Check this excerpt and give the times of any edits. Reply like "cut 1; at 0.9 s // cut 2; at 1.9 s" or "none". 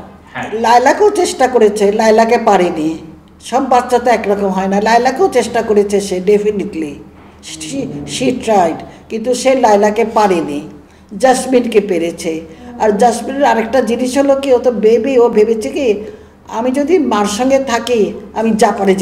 none